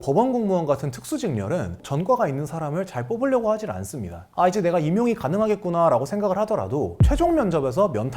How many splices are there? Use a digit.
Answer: 2